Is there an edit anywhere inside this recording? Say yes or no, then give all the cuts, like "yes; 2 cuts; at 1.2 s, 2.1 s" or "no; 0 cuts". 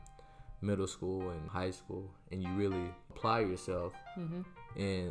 yes; 2 cuts; at 1.5 s, 3.1 s